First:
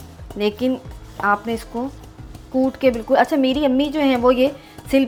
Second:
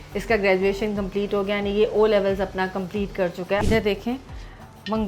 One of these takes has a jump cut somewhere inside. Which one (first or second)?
second